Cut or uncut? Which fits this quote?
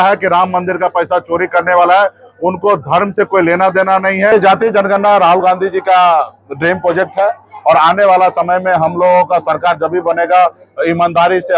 cut